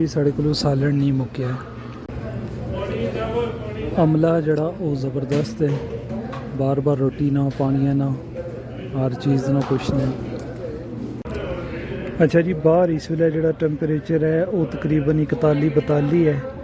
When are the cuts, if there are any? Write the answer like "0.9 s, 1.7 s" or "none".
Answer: 2.0 s, 11.2 s